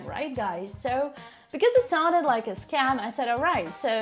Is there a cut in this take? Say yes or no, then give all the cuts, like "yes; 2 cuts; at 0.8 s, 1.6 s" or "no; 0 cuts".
no; 0 cuts